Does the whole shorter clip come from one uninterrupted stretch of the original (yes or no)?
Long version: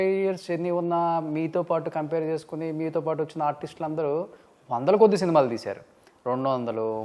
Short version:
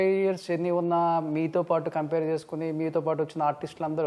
yes